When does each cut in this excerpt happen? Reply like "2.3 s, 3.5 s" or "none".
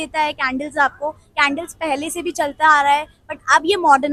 none